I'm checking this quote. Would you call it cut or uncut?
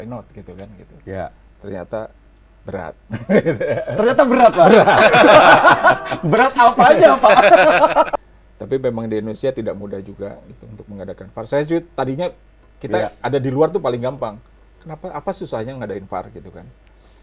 cut